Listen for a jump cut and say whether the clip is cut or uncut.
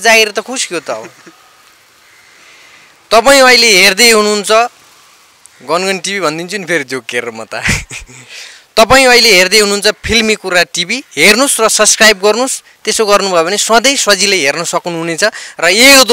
uncut